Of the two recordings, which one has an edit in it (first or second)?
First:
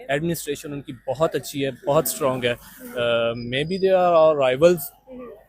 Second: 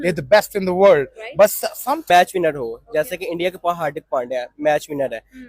second